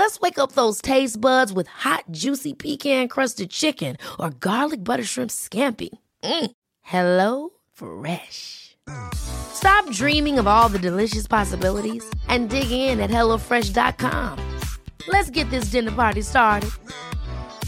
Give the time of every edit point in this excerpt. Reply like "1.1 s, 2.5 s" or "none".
none